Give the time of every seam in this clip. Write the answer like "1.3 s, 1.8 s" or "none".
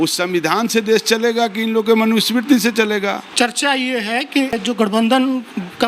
3.3 s, 4.6 s